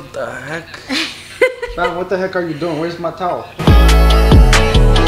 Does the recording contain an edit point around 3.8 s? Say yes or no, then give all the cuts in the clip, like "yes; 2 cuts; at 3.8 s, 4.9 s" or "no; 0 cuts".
yes; 1 cut; at 3.8 s